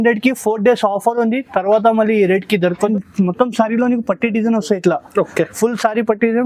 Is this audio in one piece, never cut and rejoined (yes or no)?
no